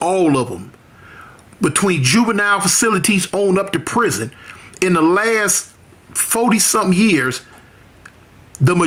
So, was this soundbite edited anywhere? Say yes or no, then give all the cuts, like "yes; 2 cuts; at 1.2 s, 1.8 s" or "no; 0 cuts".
no; 0 cuts